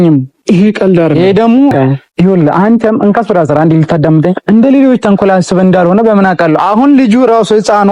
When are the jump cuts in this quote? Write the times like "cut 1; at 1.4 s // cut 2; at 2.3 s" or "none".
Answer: cut 1; at 1.7 s